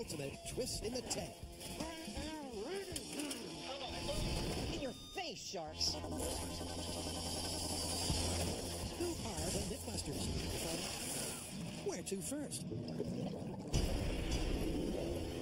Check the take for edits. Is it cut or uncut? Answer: uncut